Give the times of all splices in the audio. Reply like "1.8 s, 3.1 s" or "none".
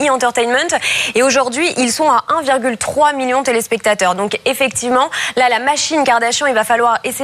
3.1 s